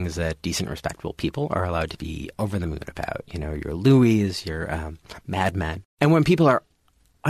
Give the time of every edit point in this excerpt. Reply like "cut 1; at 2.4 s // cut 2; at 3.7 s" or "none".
cut 1; at 5.8 s